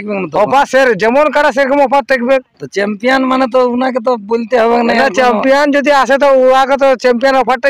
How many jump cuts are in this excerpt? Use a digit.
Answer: 0